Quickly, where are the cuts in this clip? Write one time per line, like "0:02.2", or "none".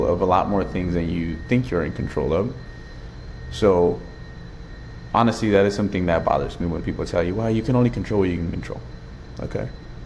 none